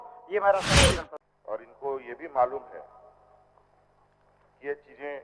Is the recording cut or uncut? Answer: cut